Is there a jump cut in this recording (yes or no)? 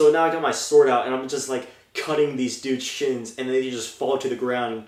no